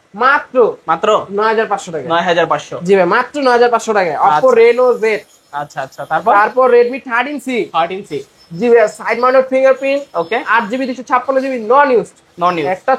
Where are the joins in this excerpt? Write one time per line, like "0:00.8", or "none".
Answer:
none

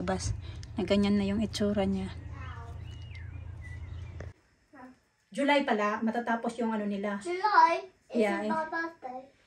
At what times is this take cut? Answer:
0:04.3

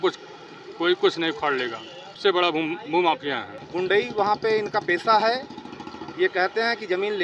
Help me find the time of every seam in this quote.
0:02.2
0:03.5

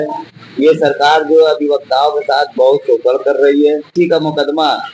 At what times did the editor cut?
0:03.9

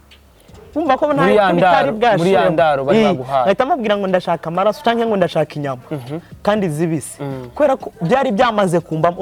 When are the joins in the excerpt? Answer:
none

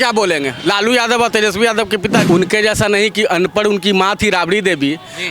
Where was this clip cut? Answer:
0:02.2

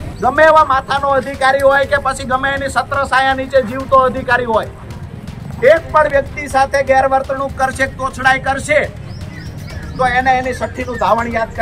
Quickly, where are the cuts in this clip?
none

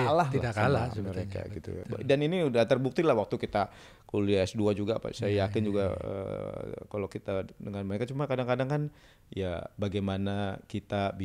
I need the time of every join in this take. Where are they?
0:01.8

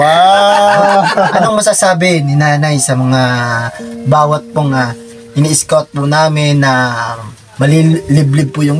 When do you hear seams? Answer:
0:01.4

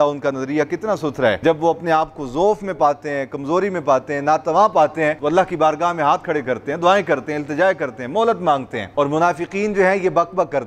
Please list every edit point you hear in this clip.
0:01.4
0:05.2
0:08.8

